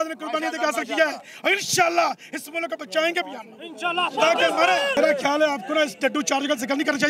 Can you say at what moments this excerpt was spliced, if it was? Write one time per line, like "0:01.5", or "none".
0:04.9